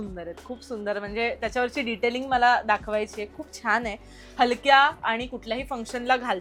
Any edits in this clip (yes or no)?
no